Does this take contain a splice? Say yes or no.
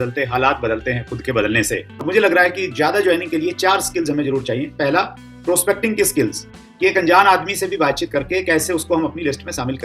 yes